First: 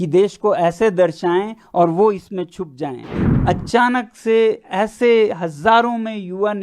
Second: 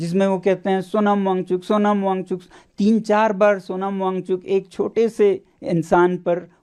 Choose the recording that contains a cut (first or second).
first